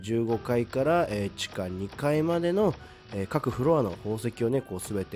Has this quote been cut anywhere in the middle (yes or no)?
no